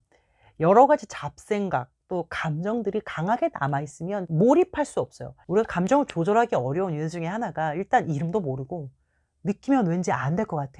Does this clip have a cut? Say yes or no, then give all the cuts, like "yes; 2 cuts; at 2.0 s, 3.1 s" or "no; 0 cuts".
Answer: yes; 1 cut; at 5.3 s